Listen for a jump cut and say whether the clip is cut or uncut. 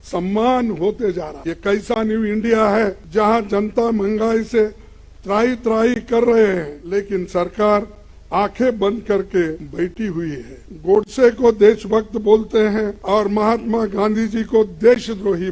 cut